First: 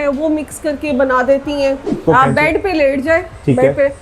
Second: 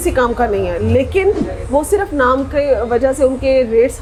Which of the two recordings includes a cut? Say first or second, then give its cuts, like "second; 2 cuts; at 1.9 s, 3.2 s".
first; 1 cut; at 2.0 s